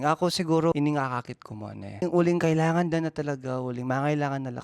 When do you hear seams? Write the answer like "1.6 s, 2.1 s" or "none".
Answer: 0.7 s, 2.0 s